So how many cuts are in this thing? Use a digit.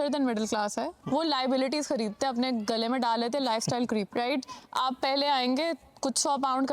1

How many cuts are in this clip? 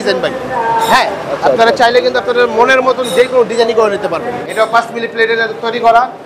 1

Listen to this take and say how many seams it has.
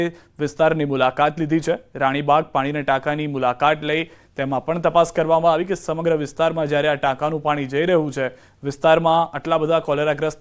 1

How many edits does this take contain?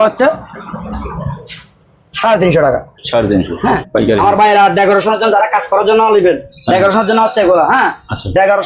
1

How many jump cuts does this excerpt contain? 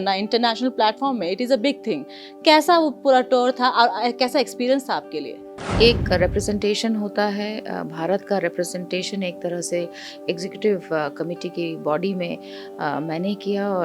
1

